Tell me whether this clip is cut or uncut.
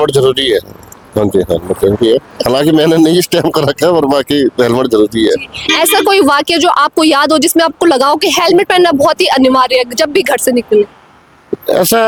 uncut